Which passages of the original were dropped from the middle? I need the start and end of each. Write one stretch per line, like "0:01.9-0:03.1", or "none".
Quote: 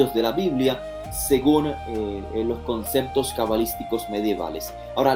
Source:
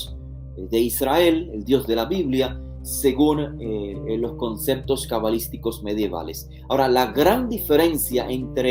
none